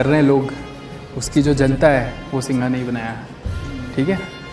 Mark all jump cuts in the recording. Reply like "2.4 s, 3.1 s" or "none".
none